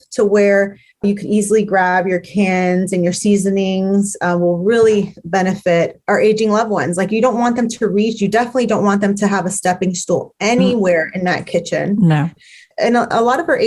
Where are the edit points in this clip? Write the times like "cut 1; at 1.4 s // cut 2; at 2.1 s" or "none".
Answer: cut 1; at 1.0 s // cut 2; at 12.4 s